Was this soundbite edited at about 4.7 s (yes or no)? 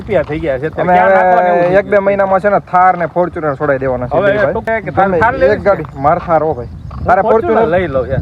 yes